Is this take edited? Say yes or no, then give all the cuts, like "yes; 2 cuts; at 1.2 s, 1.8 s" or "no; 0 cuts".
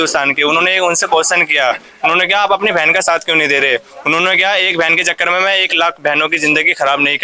no; 0 cuts